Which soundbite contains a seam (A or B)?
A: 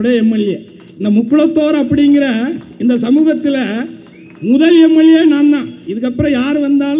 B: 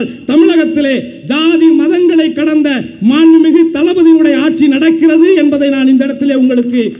A